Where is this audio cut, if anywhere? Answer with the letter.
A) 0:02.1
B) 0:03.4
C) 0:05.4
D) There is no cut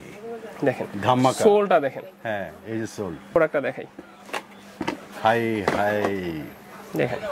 B